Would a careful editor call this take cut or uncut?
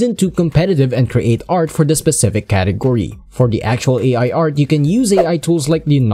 uncut